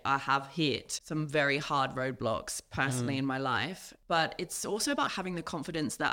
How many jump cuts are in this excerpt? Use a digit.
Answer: 3